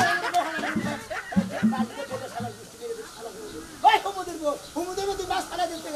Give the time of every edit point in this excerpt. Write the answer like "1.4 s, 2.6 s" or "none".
none